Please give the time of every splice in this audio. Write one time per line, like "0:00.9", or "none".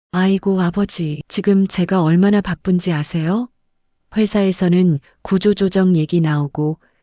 0:01.2